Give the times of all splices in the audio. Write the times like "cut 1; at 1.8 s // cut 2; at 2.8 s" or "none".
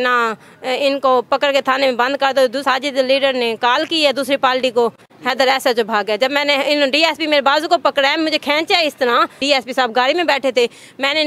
cut 1; at 2.6 s // cut 2; at 5.1 s // cut 3; at 9.4 s